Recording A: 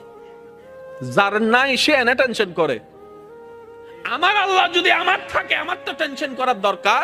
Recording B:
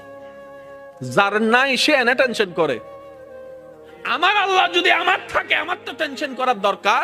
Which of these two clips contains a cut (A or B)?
A